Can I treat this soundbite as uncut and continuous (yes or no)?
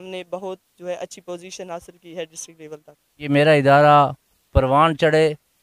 no